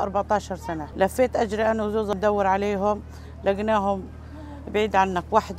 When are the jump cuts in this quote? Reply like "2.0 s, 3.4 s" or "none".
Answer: 0.8 s, 2.1 s